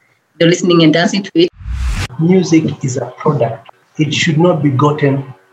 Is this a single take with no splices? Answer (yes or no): no